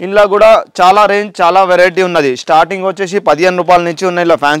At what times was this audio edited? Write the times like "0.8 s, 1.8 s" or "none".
none